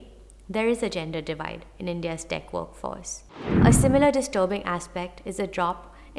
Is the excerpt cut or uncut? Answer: cut